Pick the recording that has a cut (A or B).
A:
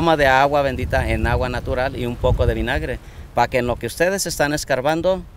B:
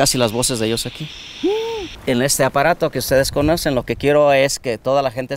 B